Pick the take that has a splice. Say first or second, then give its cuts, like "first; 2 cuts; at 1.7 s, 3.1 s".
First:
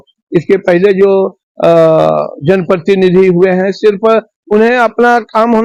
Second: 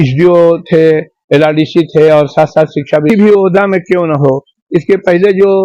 second; 1 cut; at 3.1 s